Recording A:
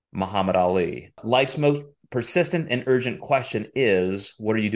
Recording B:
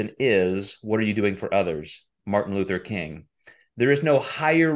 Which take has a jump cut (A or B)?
A